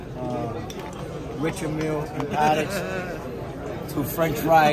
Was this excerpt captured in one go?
yes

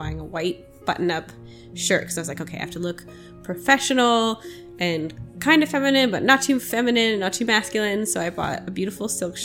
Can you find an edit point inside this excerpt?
no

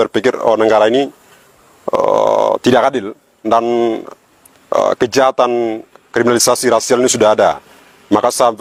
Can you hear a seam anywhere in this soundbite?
no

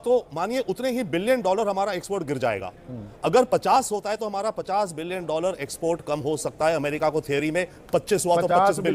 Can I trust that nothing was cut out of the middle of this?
yes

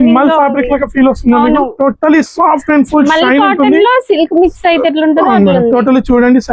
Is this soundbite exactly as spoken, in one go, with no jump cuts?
yes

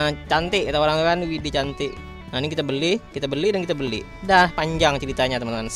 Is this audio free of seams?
no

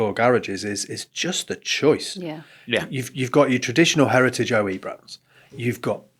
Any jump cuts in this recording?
no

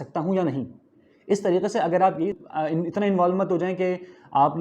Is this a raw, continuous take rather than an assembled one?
no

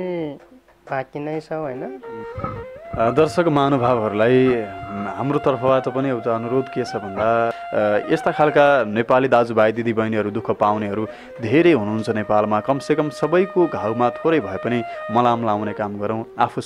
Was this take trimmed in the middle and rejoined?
yes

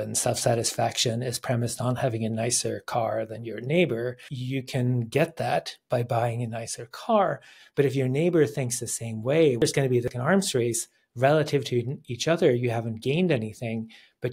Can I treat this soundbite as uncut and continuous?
no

